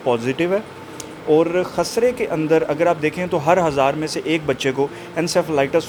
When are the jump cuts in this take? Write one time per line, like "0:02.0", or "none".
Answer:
none